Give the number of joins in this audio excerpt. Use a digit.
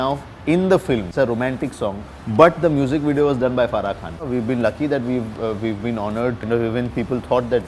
3